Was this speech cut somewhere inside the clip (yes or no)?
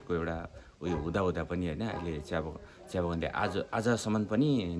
no